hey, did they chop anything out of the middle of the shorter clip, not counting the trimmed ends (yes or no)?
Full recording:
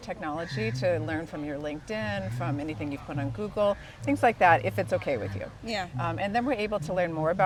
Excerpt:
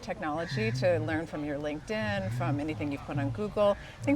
no